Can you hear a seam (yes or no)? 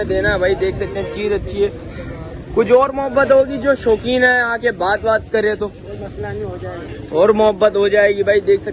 no